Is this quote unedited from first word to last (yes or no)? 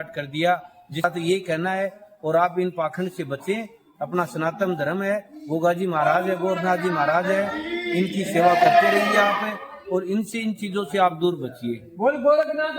no